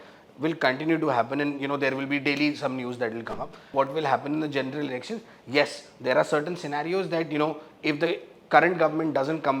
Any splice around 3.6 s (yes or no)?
yes